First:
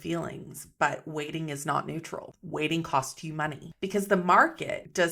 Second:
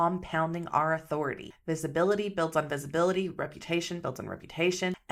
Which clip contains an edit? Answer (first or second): first